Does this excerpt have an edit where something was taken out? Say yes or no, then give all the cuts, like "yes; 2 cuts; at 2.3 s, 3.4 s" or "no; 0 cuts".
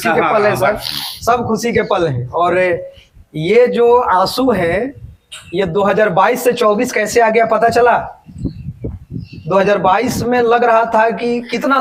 no; 0 cuts